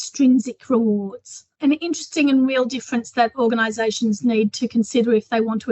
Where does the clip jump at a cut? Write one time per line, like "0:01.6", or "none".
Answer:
0:01.5